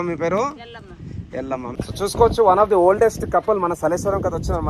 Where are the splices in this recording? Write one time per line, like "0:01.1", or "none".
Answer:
0:01.7